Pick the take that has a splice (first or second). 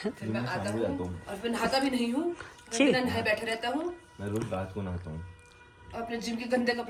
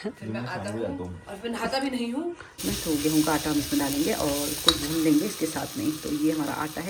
second